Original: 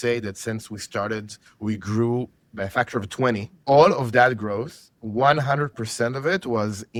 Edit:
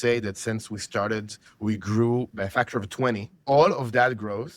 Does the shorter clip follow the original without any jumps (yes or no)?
no